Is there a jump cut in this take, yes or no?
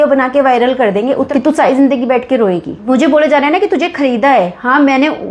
yes